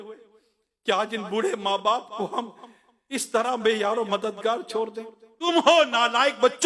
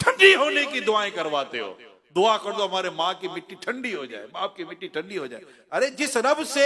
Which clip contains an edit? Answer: first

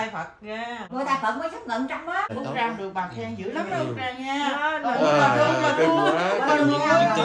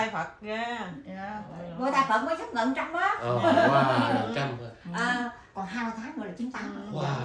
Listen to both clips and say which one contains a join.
first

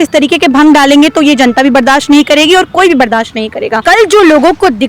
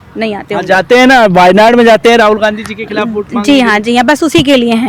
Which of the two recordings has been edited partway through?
first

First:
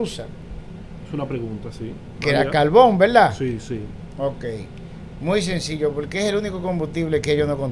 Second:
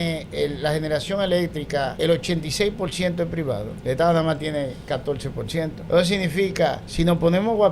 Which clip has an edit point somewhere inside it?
second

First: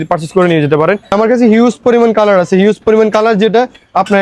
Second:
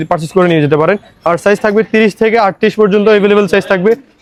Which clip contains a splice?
first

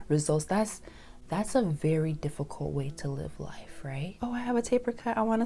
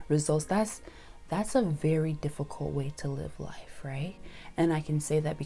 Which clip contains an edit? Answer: first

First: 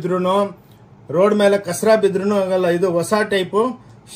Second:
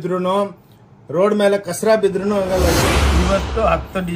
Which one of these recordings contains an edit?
second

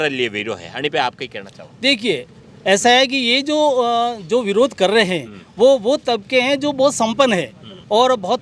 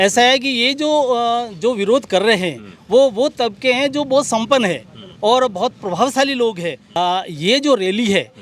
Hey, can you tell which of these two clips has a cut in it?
second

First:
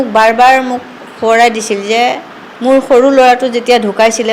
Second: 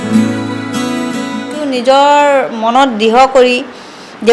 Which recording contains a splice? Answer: second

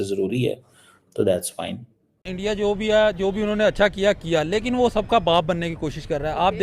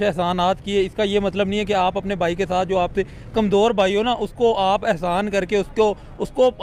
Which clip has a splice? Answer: first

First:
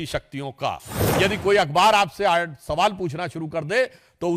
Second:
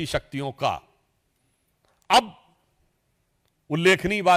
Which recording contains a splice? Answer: first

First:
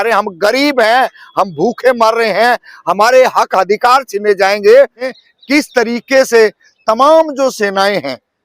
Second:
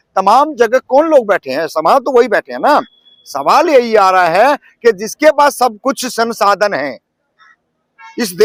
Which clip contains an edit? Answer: first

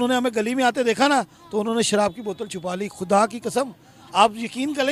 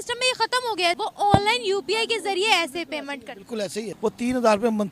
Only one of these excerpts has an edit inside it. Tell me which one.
second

